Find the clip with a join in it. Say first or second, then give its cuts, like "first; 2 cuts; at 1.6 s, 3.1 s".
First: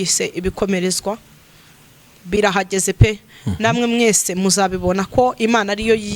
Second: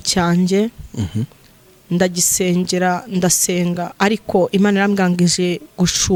first; 1 cut; at 2.4 s